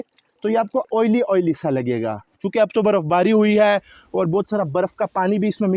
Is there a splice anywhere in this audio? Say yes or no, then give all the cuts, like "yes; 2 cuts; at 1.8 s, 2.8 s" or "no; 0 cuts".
no; 0 cuts